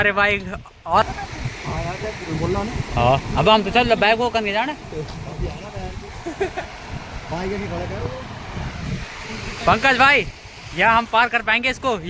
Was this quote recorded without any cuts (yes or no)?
yes